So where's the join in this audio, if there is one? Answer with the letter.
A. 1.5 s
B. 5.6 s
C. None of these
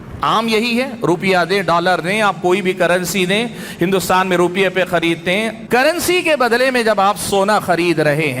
B